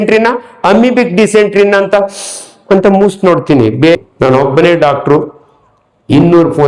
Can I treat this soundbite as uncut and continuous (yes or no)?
no